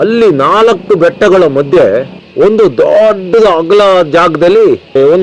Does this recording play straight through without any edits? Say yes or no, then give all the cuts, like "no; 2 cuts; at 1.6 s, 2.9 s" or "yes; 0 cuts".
yes; 0 cuts